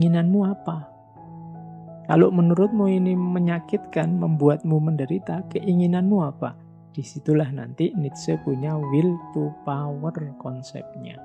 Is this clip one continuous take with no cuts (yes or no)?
yes